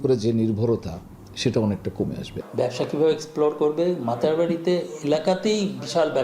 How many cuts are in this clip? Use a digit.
1